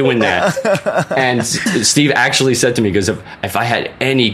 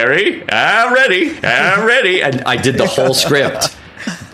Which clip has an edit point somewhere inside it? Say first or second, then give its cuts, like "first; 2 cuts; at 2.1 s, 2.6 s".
first; 1 cut; at 1.5 s